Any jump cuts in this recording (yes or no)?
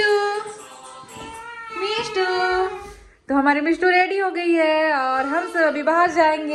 no